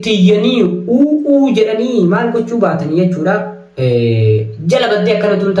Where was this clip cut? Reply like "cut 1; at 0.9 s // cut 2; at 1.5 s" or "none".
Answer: none